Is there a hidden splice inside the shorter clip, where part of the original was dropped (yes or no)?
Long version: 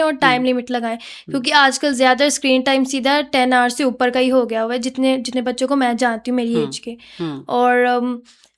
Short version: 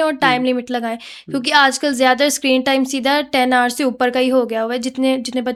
no